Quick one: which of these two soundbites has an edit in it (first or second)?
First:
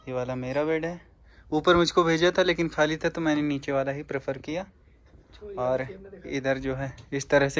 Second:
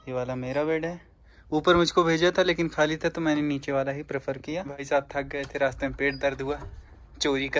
second